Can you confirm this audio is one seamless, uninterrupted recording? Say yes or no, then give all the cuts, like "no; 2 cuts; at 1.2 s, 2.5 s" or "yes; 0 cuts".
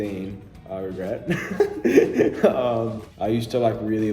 yes; 0 cuts